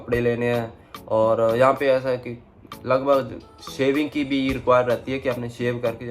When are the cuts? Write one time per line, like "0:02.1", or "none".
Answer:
none